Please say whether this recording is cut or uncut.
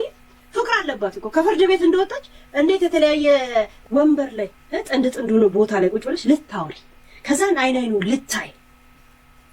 cut